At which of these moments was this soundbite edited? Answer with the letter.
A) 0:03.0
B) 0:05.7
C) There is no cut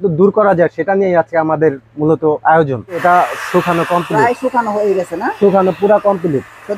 A